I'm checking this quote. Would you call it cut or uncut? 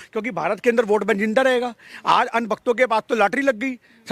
uncut